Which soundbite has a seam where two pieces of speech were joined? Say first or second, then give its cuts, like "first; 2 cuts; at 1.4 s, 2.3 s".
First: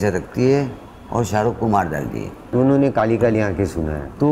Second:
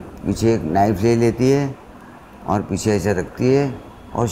first; 1 cut; at 2.5 s